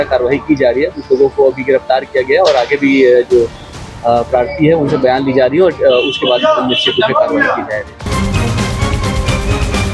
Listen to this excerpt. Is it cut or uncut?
cut